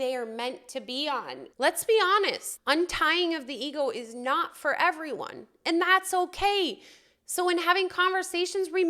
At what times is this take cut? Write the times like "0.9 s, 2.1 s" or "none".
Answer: 1.4 s, 2.5 s